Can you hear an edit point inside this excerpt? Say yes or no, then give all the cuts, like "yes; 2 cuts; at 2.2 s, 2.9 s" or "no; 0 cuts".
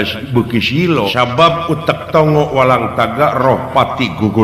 yes; 1 cut; at 1.1 s